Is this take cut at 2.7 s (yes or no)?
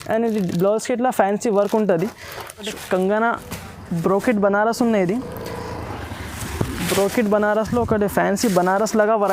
yes